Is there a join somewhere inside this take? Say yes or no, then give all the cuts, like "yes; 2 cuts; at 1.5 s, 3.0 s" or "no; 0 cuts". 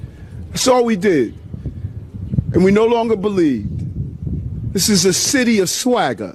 no; 0 cuts